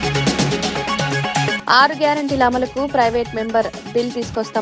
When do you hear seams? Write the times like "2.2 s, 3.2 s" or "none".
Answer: 1.6 s